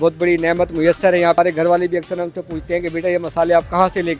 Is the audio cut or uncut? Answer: cut